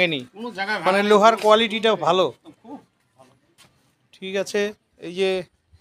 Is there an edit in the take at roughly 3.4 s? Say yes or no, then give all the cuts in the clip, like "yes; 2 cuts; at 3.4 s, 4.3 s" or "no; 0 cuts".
no; 0 cuts